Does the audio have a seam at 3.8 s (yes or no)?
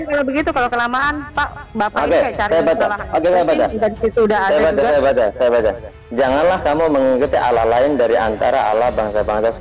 no